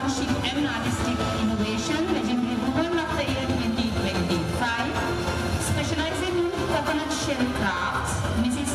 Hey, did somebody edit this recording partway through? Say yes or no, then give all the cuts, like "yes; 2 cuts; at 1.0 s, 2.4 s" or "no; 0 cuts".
no; 0 cuts